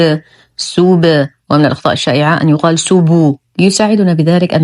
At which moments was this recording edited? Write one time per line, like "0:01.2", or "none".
0:03.4